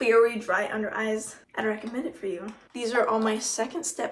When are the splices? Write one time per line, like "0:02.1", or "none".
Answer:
0:01.4
0:02.6